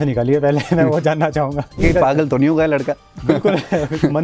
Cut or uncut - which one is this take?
cut